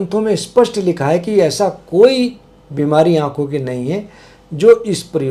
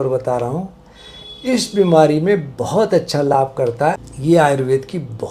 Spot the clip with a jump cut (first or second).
second